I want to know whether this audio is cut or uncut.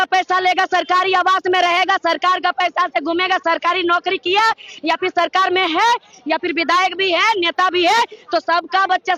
uncut